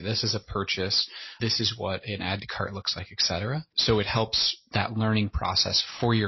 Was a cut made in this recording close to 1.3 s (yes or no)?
yes